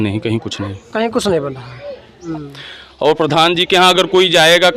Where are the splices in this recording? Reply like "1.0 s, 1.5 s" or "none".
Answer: 2.2 s